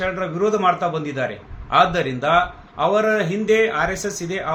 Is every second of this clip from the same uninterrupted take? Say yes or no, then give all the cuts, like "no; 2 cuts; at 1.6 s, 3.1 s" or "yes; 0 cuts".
yes; 0 cuts